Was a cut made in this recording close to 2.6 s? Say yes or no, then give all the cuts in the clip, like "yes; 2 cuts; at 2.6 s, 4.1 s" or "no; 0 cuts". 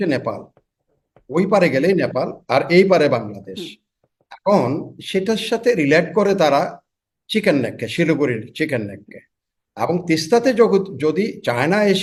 no; 0 cuts